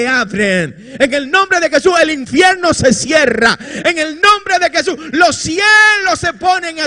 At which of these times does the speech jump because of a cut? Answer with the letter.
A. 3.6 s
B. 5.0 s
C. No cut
C